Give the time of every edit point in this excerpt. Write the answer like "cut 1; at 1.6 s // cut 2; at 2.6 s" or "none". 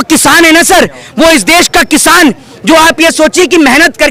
none